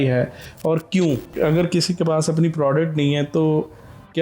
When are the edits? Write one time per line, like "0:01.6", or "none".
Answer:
0:01.3